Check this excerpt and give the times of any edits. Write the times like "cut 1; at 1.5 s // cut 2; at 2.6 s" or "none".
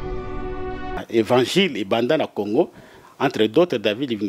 cut 1; at 1.0 s